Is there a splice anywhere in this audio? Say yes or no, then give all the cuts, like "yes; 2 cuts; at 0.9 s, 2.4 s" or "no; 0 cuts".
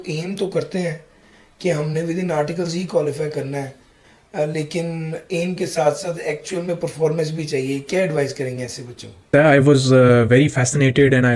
yes; 1 cut; at 9.1 s